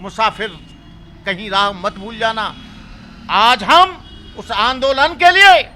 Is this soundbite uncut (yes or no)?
yes